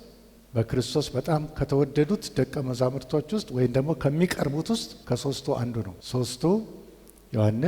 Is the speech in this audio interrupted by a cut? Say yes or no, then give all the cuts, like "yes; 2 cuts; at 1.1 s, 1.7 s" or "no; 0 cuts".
yes; 2 cuts; at 4.9 s, 6.0 s